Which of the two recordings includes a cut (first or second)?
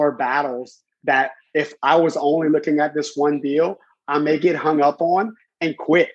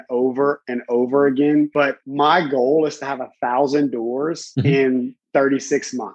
second